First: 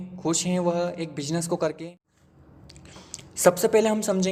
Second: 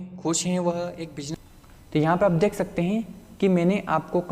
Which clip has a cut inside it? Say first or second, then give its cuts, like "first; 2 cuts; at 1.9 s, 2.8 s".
second; 1 cut; at 1.2 s